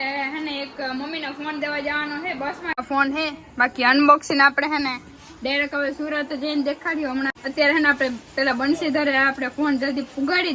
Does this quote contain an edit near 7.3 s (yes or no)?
yes